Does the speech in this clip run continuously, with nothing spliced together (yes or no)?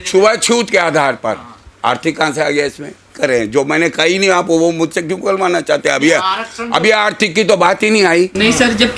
yes